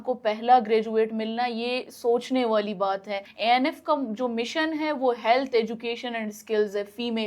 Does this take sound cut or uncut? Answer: cut